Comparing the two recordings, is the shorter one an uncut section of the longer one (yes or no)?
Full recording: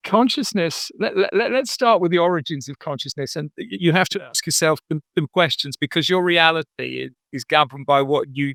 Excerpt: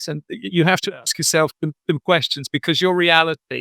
yes